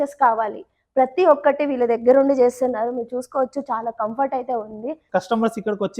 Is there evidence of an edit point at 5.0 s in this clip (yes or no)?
yes